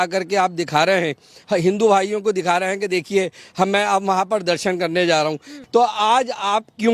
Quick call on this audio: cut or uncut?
cut